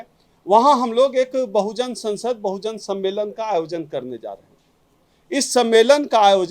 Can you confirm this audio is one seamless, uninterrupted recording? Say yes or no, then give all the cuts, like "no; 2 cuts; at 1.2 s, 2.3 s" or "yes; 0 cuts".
yes; 0 cuts